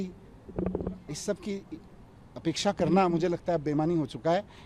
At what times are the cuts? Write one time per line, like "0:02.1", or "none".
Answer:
none